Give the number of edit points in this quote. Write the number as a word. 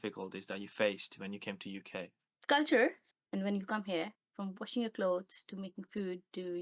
three